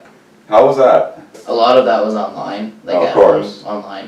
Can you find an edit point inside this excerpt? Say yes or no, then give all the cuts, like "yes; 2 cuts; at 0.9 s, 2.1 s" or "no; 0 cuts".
yes; 1 cut; at 1.4 s